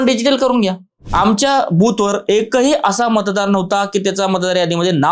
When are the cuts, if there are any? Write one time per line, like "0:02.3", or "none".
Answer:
0:01.0